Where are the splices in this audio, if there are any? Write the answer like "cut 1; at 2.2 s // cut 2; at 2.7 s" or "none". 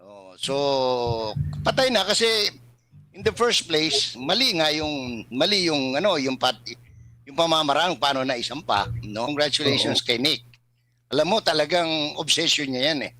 cut 1; at 9.3 s